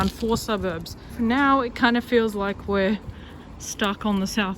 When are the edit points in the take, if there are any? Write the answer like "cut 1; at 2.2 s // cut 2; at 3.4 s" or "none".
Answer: cut 1; at 1.1 s